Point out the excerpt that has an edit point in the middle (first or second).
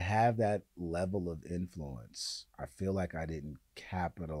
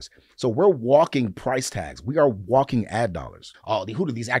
second